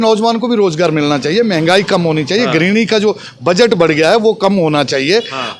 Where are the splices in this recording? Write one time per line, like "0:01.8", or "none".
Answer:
none